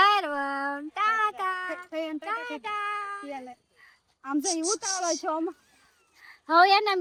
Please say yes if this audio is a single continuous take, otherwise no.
yes